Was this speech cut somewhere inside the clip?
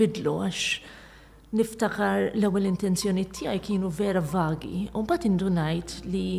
no; 0 cuts

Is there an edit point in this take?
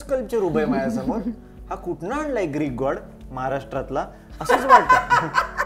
no; 0 cuts

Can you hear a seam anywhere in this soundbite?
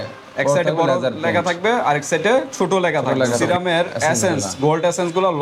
yes; 1 cut; at 3.4 s

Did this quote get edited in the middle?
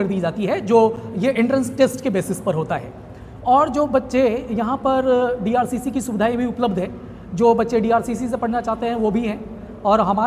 no; 0 cuts

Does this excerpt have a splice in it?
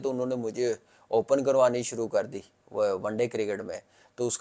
no; 0 cuts

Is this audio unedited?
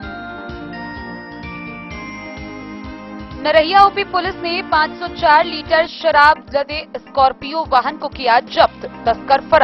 no; 1 cut; at 3.3 s

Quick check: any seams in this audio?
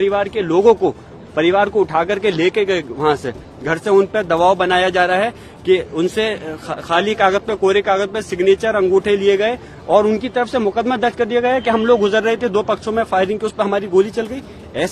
no; 0 cuts

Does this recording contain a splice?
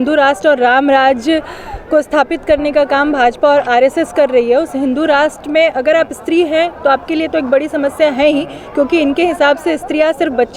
no; 0 cuts

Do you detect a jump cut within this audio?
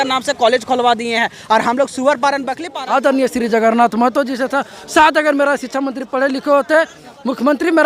yes; 1 cut; at 2.6 s

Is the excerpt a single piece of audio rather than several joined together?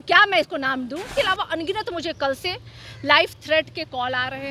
no; 1 cut; at 1.1 s

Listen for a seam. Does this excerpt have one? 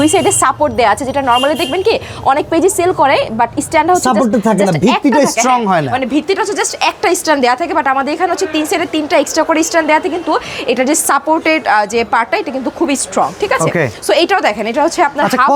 no; 0 cuts

